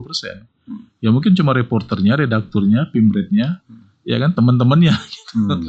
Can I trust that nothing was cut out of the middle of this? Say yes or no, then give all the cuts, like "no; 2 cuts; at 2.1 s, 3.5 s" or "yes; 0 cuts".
yes; 0 cuts